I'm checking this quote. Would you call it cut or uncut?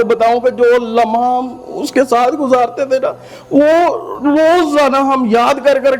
uncut